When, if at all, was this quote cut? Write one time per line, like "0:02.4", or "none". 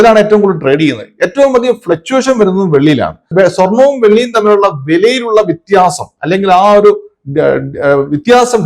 0:03.3